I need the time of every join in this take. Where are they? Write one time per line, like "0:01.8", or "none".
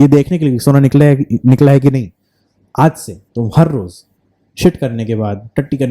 none